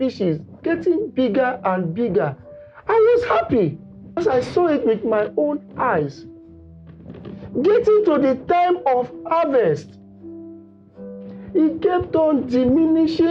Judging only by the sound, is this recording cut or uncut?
cut